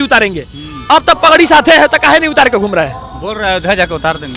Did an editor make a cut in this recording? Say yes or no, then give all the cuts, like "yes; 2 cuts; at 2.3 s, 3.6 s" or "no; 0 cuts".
no; 0 cuts